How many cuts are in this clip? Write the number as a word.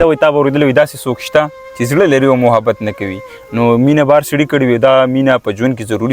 zero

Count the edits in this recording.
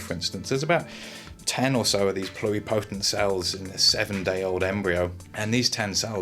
one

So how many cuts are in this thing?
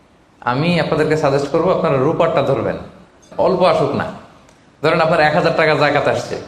one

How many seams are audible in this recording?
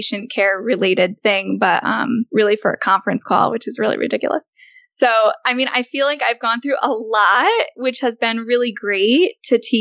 two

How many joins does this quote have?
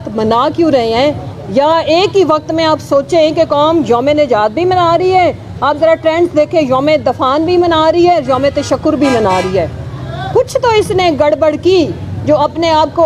zero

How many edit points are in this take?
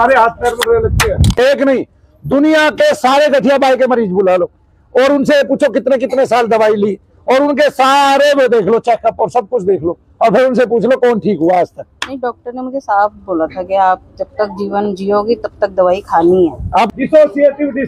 two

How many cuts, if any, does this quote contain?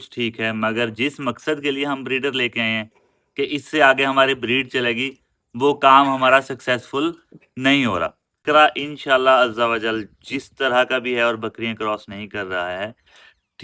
one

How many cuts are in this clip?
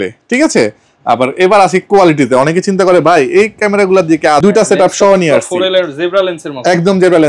one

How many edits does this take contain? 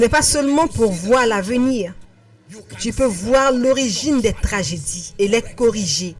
one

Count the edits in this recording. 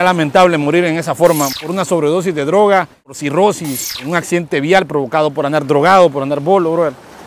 three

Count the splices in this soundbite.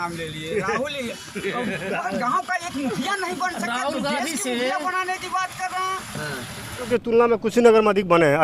one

